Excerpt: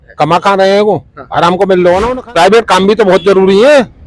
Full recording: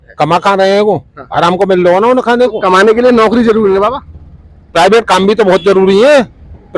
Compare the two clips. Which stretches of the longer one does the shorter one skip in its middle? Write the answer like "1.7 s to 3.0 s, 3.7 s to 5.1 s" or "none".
2.1 s to 4.5 s